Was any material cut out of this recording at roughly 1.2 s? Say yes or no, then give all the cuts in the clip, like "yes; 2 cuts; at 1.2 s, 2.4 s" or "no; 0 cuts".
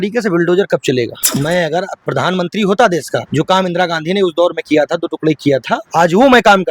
yes; 4 cuts; at 1.2 s, 2.0 s, 3.2 s, 5.8 s